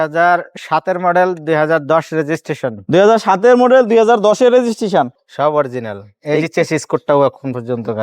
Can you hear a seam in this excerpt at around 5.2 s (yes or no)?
yes